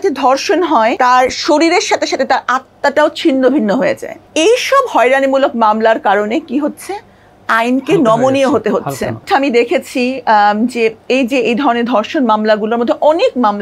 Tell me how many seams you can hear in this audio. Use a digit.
3